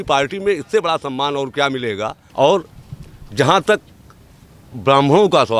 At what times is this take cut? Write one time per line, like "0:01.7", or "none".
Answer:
0:02.2